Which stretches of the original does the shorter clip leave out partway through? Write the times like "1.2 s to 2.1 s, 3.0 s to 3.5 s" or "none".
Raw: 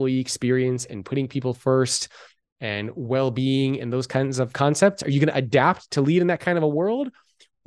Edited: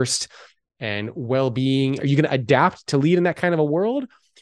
3.8 s to 5.0 s